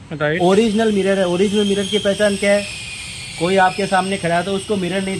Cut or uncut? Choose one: uncut